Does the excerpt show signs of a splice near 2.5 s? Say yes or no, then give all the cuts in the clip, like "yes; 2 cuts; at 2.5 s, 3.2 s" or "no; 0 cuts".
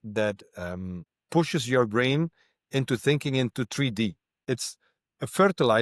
no; 2 cuts; at 1.1 s, 4.4 s